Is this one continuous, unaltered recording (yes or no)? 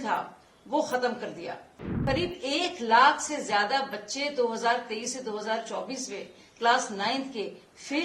no